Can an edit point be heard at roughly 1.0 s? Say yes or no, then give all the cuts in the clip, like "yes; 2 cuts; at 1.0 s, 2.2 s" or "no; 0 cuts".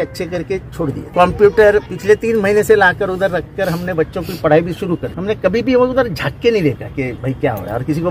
yes; 4 cuts; at 1.0 s, 1.9 s, 5.1 s, 7.2 s